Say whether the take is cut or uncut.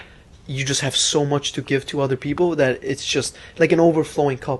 uncut